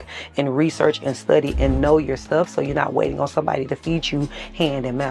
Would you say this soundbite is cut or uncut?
uncut